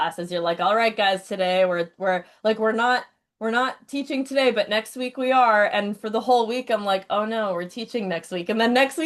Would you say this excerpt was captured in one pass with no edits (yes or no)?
yes